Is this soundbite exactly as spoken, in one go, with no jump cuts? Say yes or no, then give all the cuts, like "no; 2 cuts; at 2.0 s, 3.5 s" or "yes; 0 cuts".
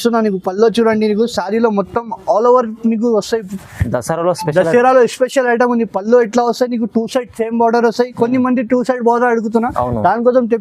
yes; 0 cuts